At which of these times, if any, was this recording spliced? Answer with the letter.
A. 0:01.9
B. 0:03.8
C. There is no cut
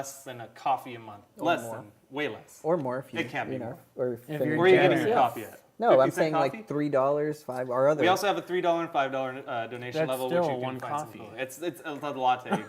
A